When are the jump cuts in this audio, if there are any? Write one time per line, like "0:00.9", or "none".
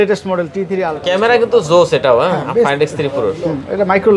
0:00.9